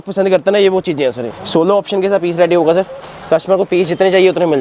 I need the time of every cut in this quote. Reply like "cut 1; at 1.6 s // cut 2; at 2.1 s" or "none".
cut 1; at 1.3 s